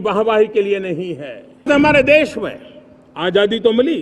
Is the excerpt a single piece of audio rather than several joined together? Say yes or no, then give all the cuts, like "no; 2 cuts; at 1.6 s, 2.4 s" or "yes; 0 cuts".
no; 1 cut; at 1.7 s